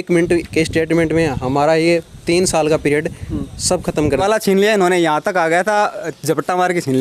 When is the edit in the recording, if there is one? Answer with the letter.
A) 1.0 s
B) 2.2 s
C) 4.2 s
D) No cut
C